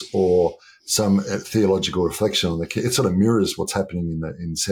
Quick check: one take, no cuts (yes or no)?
yes